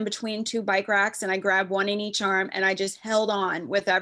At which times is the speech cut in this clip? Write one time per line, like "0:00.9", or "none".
none